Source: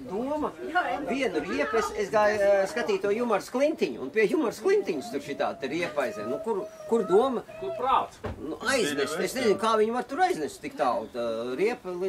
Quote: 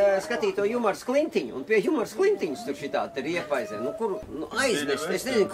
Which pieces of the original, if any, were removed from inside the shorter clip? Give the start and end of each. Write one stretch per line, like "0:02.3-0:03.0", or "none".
0:06.7-0:08.4